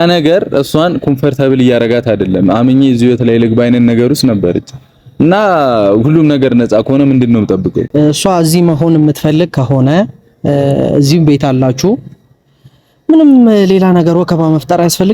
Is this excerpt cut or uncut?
cut